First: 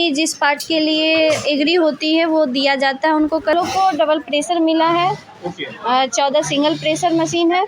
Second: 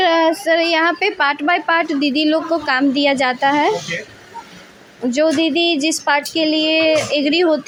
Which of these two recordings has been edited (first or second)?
first